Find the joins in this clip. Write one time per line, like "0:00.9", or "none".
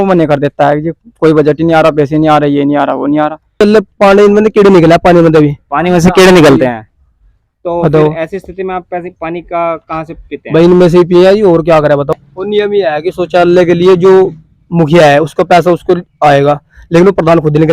0:03.6
0:12.1